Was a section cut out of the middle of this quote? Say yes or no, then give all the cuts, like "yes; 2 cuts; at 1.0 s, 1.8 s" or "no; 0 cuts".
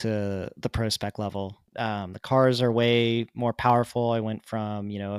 yes; 1 cut; at 1.6 s